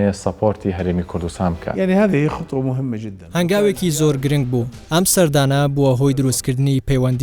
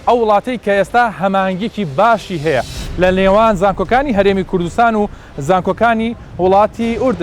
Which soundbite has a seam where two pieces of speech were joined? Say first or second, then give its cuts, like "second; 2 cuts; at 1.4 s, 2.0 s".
first; 3 cuts; at 1.7 s, 3.1 s, 4.8 s